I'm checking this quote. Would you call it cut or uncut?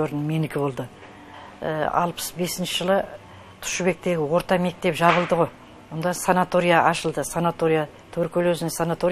uncut